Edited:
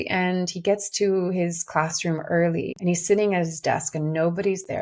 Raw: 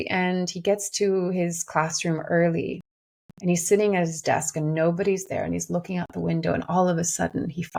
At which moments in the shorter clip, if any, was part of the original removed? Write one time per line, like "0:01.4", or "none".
0:02.7